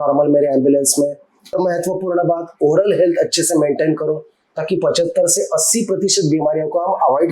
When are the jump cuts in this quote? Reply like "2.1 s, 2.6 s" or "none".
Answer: 1.5 s